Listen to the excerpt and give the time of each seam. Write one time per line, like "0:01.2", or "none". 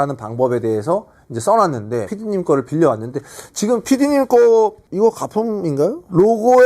0:02.1